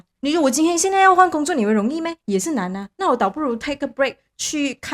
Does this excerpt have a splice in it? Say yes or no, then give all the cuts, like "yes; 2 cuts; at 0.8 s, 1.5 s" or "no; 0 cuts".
no; 0 cuts